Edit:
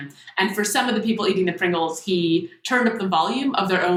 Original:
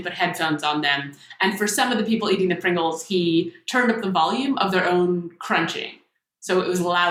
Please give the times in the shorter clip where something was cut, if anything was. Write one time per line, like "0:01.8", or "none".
none